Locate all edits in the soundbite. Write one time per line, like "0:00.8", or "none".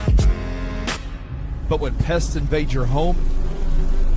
none